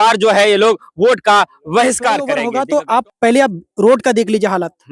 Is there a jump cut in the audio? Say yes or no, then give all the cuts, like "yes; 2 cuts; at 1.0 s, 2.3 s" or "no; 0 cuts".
yes; 1 cut; at 2.4 s